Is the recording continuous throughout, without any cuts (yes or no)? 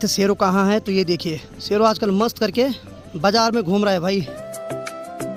yes